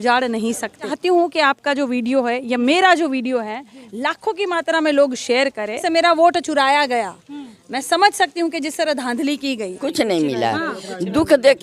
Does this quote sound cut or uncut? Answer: cut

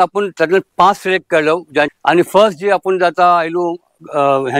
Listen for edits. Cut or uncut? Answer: cut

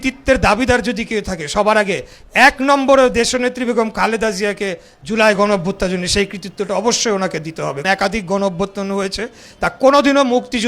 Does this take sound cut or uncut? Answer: cut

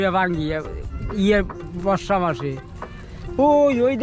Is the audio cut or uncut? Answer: uncut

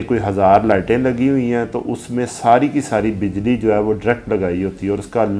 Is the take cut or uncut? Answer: uncut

